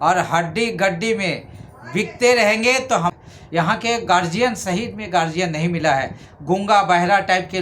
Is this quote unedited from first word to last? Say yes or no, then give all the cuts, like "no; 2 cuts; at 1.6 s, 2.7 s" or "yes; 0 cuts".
no; 1 cut; at 3.1 s